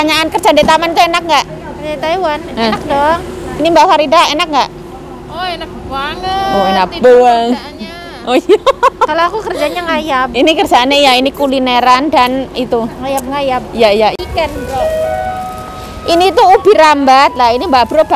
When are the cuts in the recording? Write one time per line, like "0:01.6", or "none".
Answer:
0:14.1